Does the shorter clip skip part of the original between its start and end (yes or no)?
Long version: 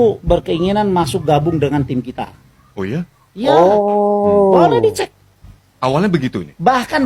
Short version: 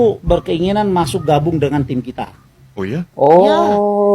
yes